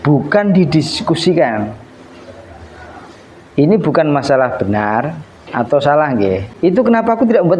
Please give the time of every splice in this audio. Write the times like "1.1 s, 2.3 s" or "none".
6.5 s